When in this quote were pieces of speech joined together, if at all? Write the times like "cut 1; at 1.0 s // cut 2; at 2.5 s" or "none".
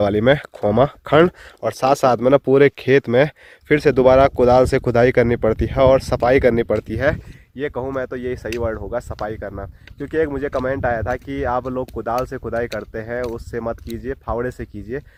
none